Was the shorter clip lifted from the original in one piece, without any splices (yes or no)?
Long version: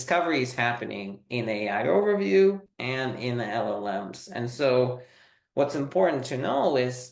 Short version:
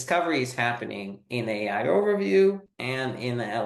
yes